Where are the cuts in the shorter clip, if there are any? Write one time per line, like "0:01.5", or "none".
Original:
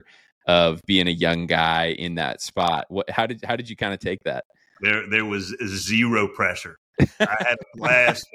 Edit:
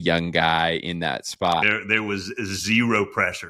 0:01.6